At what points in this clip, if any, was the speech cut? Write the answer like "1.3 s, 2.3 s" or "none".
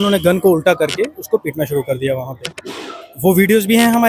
none